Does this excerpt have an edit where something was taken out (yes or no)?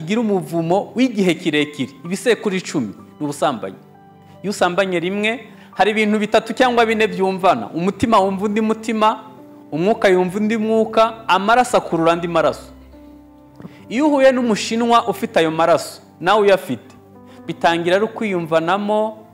yes